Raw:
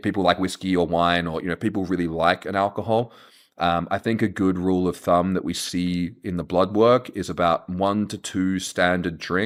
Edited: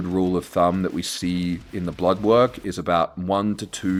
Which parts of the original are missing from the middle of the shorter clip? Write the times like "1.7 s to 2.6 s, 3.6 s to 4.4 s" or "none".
none